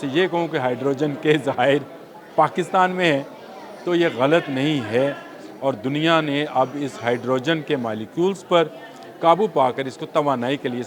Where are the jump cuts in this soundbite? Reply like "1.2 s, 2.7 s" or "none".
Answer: none